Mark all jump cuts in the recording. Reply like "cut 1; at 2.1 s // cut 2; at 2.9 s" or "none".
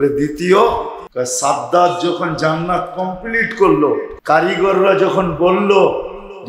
cut 1; at 1.0 s // cut 2; at 4.1 s